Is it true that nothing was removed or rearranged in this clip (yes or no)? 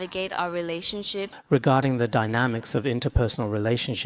no